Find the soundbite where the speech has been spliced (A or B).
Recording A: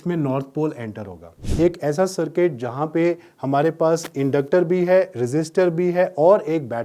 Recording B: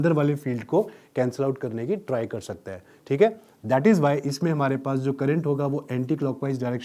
A